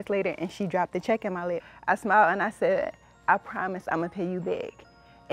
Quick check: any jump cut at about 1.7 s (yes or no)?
yes